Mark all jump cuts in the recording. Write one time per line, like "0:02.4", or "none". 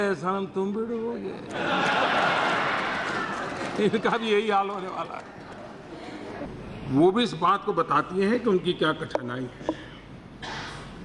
0:06.4